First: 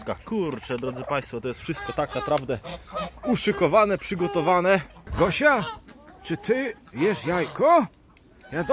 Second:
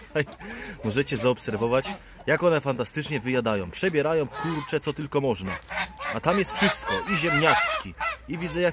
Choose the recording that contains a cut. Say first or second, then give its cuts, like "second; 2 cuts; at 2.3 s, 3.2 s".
first; 1 cut; at 5.0 s